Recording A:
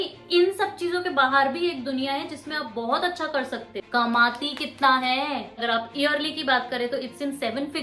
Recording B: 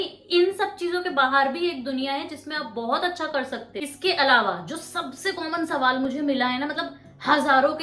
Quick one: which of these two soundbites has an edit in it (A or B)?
A